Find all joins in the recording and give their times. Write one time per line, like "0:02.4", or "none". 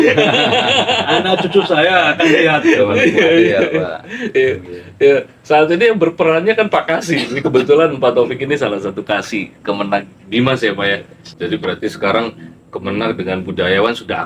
0:11.1